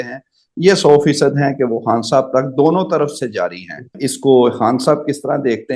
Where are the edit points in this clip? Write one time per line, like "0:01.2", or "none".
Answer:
0:04.0